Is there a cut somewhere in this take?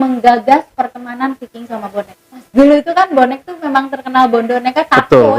yes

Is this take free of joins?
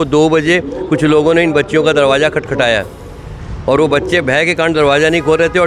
yes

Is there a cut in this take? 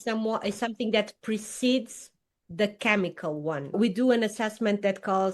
yes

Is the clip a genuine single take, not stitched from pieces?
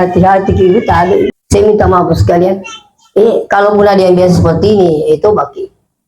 no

